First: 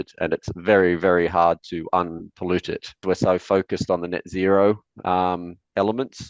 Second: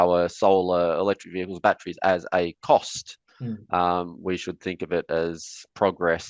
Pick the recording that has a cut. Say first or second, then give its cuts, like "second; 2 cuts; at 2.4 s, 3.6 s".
first; 1 cut; at 3.0 s